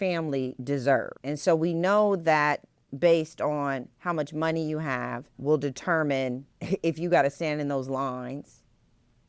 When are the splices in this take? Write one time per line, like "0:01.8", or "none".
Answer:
0:01.2
0:05.3
0:06.5

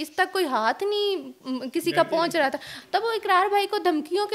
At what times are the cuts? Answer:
0:02.8

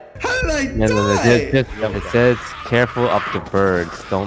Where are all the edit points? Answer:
0:01.8

